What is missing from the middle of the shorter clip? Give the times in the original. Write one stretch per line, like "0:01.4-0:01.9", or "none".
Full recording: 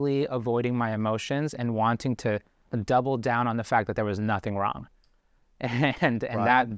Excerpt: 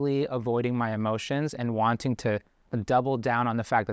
none